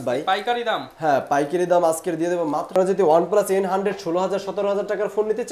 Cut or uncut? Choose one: cut